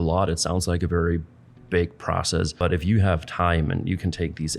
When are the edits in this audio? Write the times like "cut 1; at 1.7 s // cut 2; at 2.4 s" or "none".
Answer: cut 1; at 2.5 s